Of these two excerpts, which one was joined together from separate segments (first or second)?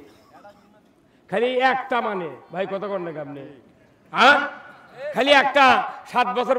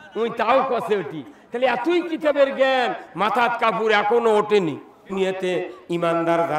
second